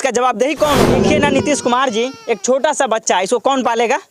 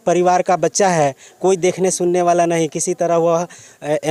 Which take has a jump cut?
first; 1 cut; at 1.0 s

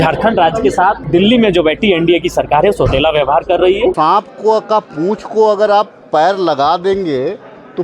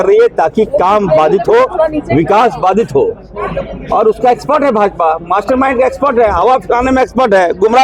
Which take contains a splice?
first; 2 cuts; at 1.0 s, 4.0 s

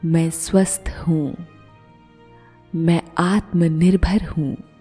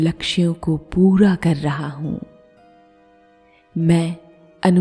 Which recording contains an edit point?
second; 2 cuts; at 2.3 s, 3.7 s

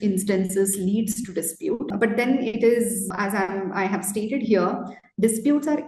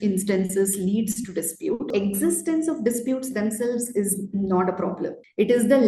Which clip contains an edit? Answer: second; 1 cut; at 1.9 s

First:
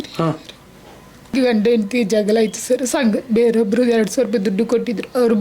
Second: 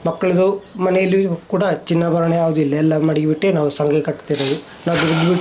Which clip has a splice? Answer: first; 1 cut; at 1.3 s

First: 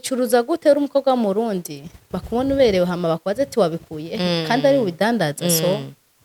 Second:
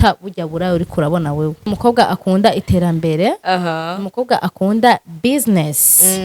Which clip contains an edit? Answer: second; 1 cut; at 1.7 s

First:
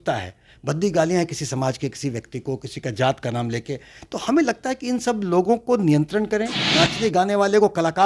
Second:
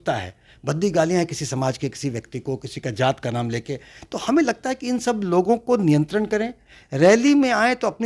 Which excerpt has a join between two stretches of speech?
first; 1 cut; at 6.6 s

